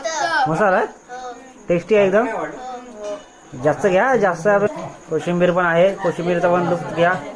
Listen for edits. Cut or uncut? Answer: uncut